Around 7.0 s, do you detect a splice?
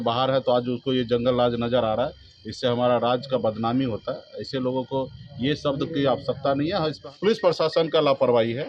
yes; 1 cut; at 7.0 s

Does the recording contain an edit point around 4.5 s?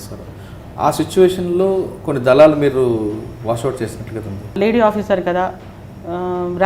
yes; 1 cut; at 4.5 s

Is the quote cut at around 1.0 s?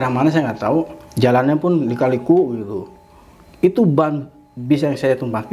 yes; 1 cut; at 1.0 s

